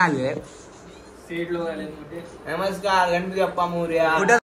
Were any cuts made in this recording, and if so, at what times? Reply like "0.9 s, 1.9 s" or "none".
none